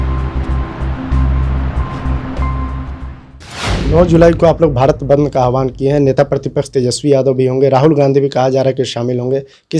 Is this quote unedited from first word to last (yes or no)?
no